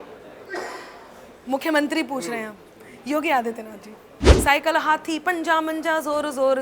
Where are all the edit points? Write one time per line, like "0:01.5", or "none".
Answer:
0:04.3